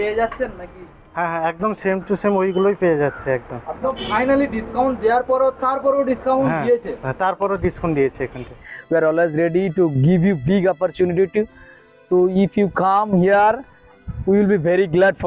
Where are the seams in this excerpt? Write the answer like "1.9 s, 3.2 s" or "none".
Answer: 3.8 s, 8.7 s

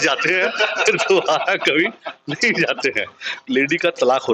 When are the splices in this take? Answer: 3.3 s

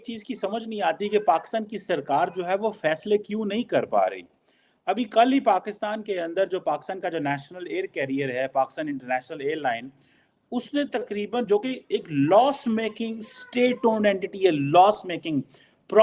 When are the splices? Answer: none

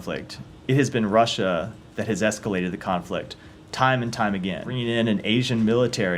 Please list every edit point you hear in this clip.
4.7 s

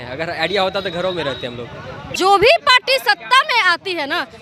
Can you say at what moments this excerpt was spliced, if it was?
2.1 s

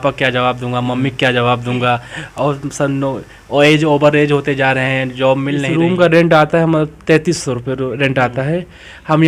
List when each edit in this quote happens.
5.6 s

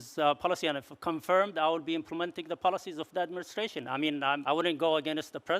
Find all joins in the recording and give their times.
4.4 s

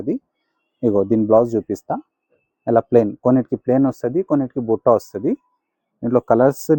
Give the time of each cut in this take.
none

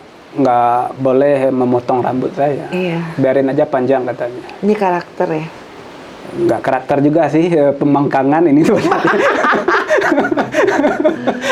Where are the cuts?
none

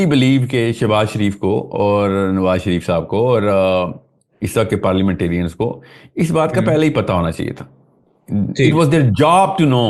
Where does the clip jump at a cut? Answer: none

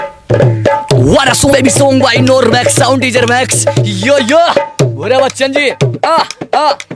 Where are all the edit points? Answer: 1.5 s

